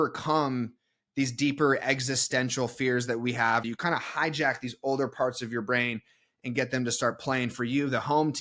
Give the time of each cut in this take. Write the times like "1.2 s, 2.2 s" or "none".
3.6 s